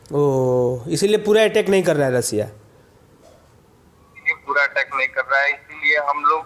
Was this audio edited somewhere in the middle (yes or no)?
no